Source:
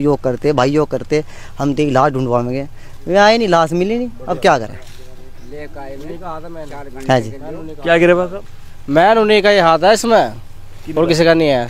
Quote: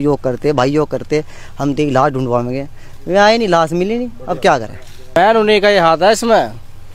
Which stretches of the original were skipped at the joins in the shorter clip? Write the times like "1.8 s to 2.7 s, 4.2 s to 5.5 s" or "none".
5.1 s to 9.0 s